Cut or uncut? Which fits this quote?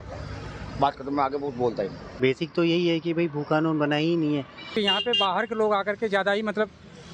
cut